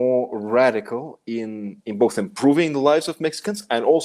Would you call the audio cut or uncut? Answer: uncut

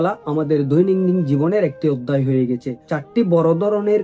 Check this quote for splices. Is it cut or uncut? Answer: cut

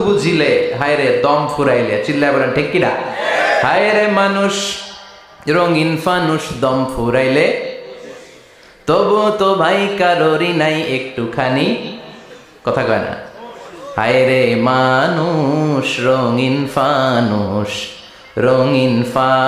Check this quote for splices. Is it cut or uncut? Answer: uncut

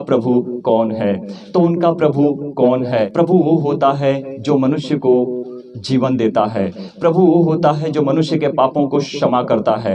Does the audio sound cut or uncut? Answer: cut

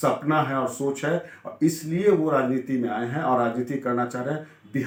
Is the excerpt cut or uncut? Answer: uncut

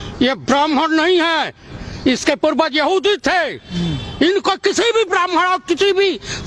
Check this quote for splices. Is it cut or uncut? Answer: uncut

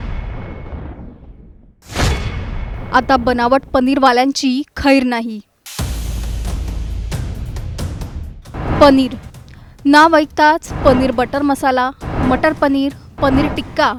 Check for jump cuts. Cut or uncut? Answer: uncut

